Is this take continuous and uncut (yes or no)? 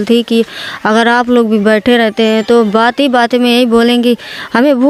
yes